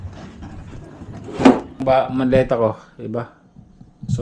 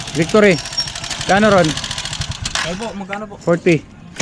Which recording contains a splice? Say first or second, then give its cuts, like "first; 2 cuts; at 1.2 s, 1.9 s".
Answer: first; 1 cut; at 1.8 s